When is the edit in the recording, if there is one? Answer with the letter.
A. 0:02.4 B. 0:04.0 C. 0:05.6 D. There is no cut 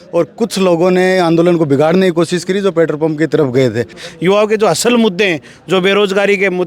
B